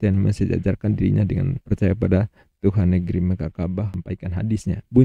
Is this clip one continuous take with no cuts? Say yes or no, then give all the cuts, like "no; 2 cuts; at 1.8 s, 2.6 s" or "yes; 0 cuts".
no; 1 cut; at 3.9 s